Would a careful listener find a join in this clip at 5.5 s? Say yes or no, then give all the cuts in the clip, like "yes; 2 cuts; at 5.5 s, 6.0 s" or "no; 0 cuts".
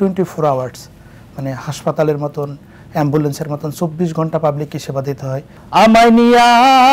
yes; 1 cut; at 5.5 s